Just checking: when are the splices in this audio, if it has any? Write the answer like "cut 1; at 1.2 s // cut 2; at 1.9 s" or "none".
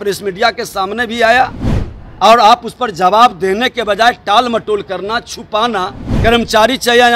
cut 1; at 6.0 s